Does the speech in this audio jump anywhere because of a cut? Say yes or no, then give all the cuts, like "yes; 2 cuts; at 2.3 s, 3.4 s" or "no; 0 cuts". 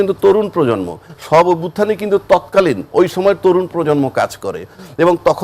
no; 0 cuts